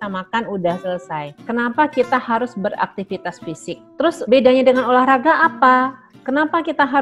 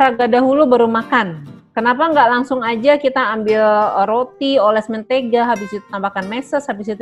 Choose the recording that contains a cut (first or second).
first